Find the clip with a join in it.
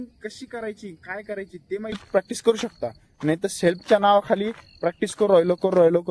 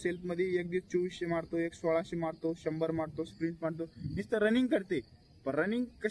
first; 1 cut; at 2.0 s

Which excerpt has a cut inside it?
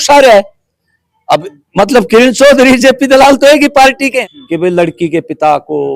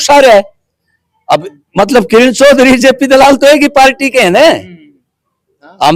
first; 1 cut; at 4.2 s

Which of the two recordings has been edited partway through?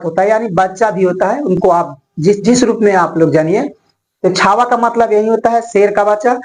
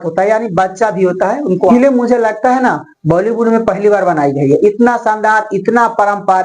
second; 1 cut; at 1.6 s

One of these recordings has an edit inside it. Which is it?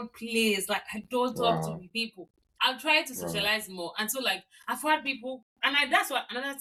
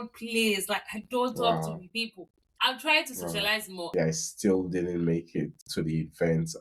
second; 1 cut; at 3.9 s

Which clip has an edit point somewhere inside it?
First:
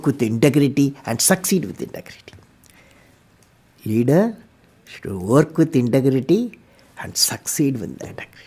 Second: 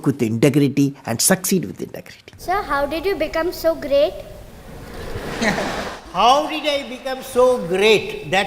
second; 1 cut; at 2.4 s

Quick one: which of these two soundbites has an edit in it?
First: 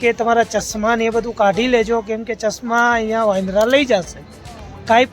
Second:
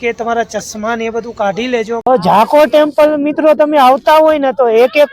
second; 1 cut; at 2.1 s

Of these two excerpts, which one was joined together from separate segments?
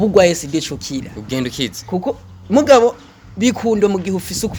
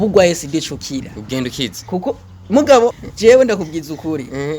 second; 1 cut; at 3.1 s

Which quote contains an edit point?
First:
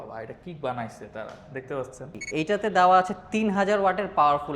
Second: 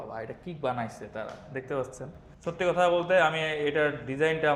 first; 1 cut; at 2.2 s

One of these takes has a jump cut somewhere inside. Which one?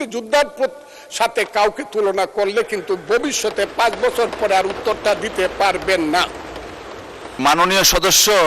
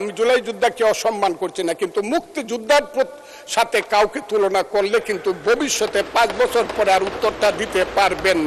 first; 1 cut; at 7.4 s

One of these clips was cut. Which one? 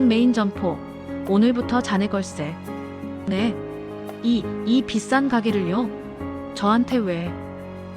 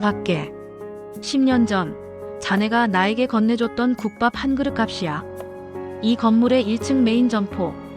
first; 1 cut; at 2.6 s

